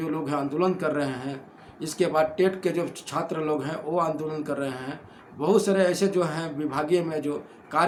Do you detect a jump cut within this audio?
no; 0 cuts

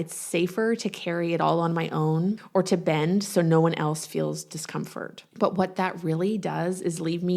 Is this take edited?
yes; 2 cuts; at 2.4 s, 5.2 s

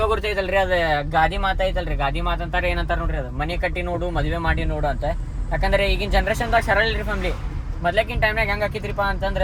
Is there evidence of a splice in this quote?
no; 0 cuts

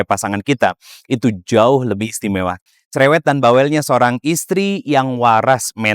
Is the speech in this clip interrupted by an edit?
yes; 1 cut; at 2.6 s

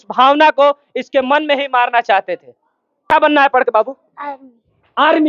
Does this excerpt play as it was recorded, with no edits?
no; 1 cut; at 3.1 s

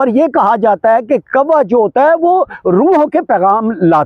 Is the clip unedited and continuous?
yes; 0 cuts

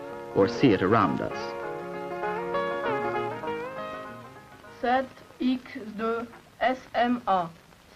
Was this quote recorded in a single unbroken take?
no; 1 cut; at 6.1 s

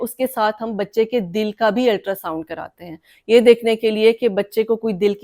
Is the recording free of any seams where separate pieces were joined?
yes; 0 cuts

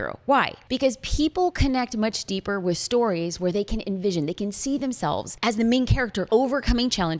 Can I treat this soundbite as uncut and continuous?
no; 2 cuts; at 5.3 s, 6.2 s

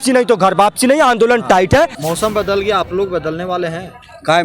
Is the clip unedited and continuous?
no; 1 cut; at 2.0 s

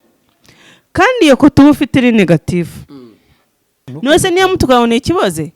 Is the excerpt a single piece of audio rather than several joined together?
no; 1 cut; at 3.9 s

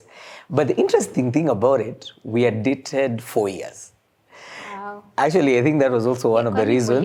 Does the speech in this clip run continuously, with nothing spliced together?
yes; 0 cuts

